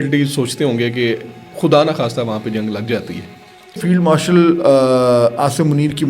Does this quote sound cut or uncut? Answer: cut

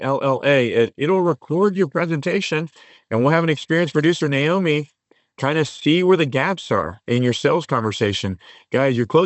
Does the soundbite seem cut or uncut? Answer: uncut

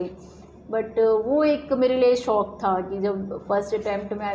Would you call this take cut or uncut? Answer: uncut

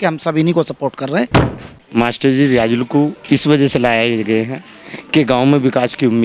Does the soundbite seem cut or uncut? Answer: cut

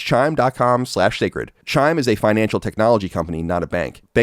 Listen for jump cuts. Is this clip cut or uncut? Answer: cut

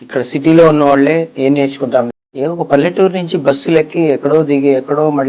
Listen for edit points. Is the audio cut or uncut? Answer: cut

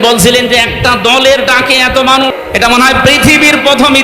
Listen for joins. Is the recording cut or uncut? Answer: cut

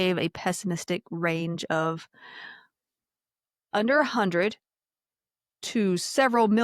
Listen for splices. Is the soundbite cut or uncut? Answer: uncut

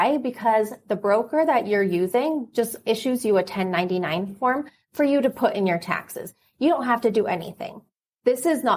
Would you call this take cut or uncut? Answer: uncut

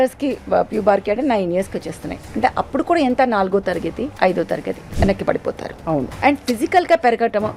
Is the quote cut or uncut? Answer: cut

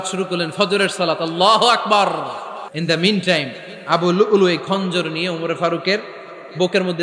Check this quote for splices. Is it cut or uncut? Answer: cut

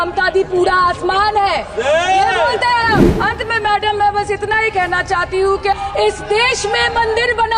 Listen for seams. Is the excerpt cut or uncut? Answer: cut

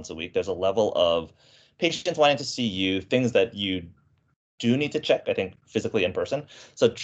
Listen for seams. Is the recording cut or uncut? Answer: uncut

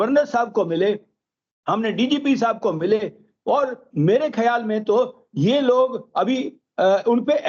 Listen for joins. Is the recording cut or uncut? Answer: uncut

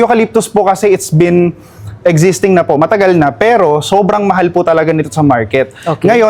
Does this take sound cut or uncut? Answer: uncut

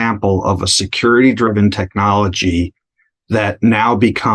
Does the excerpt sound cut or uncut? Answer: uncut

